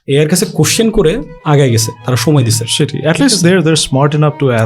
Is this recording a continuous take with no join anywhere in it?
no; 1 cut; at 1.3 s

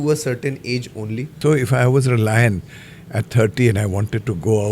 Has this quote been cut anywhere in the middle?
yes; 1 cut; at 1.3 s

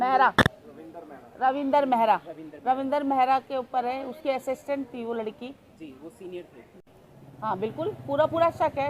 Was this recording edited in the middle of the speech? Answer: yes; 1 cut; at 6.8 s

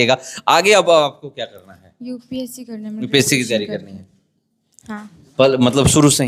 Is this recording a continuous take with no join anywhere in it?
yes; 0 cuts

